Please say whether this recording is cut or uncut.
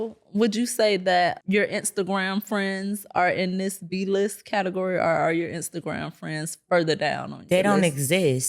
cut